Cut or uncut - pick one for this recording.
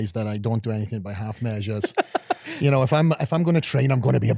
uncut